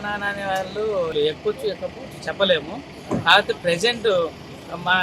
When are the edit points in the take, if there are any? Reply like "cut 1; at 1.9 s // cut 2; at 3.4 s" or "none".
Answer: cut 1; at 1.1 s